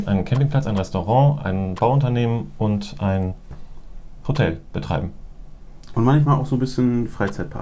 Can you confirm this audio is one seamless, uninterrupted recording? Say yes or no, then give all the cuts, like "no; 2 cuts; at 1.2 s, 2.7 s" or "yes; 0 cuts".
yes; 0 cuts